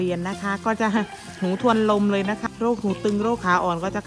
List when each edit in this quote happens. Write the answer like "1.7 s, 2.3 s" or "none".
2.4 s